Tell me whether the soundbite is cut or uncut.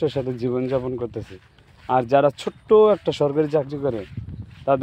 uncut